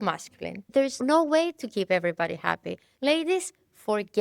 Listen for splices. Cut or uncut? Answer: cut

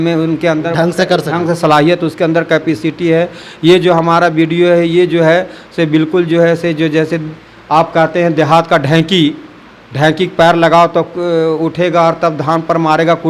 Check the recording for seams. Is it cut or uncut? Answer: uncut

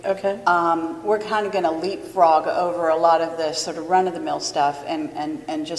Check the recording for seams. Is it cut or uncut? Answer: cut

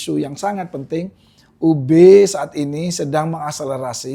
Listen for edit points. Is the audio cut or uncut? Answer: uncut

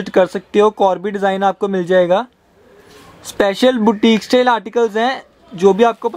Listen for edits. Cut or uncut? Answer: uncut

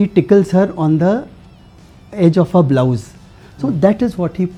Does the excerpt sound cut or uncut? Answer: uncut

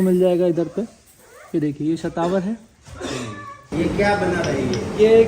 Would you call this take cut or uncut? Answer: cut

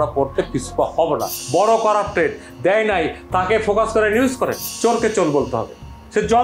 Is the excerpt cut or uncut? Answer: cut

